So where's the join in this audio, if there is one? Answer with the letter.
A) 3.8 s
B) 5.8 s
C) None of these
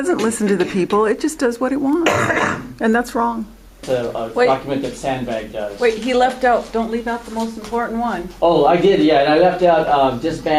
A